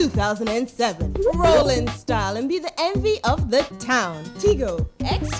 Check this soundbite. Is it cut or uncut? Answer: cut